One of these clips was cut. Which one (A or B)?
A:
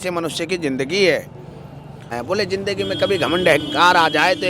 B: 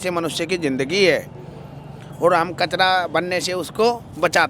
A